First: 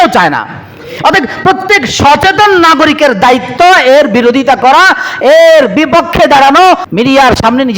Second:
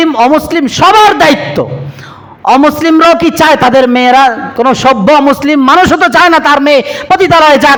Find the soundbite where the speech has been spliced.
first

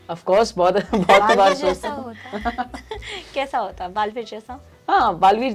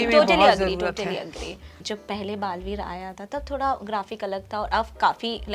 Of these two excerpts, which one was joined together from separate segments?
second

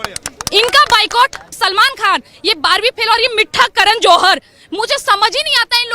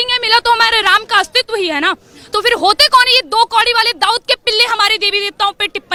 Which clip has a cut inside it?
first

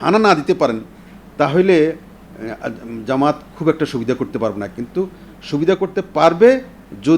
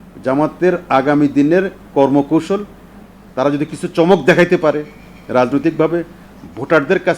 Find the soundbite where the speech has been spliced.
second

